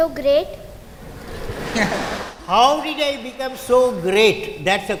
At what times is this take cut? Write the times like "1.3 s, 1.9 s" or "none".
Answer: none